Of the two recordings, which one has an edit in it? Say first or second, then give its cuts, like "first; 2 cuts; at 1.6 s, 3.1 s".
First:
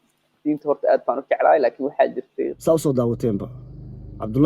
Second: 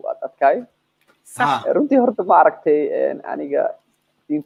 first; 1 cut; at 2.5 s